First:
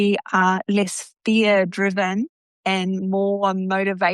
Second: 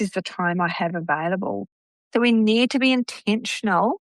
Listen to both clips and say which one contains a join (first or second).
second